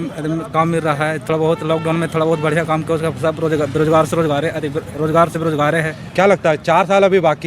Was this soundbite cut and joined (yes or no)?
no